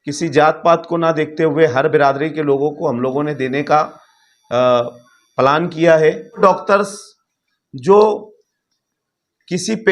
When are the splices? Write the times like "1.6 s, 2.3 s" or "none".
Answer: 6.4 s

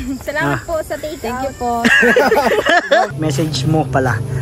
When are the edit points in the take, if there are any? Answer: 3.1 s

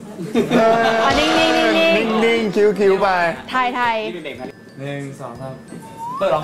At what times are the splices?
none

